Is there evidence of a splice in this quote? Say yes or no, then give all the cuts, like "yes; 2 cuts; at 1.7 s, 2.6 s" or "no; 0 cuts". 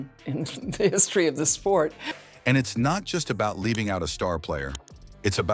no; 0 cuts